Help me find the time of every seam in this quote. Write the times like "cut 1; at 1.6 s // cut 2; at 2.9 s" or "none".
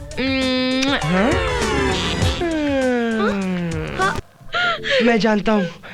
cut 1; at 4.2 s